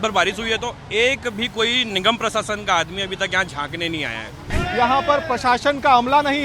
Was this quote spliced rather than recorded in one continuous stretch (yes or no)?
yes